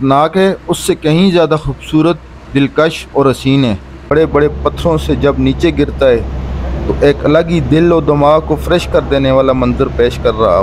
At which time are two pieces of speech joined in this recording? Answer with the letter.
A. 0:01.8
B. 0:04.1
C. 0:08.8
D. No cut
B